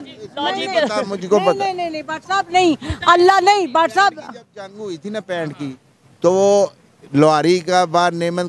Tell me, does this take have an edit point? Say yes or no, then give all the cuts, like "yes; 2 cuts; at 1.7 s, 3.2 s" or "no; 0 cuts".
no; 0 cuts